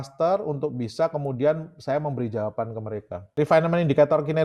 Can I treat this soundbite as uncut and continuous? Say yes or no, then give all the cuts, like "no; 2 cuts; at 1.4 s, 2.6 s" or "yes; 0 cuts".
no; 1 cut; at 3.3 s